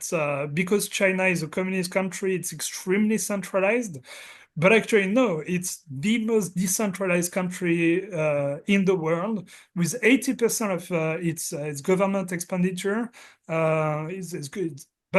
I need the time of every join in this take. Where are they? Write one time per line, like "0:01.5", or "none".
none